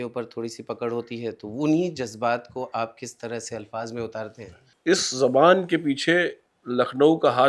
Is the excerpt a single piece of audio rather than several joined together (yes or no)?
no